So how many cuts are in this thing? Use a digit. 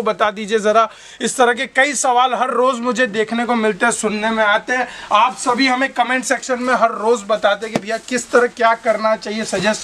0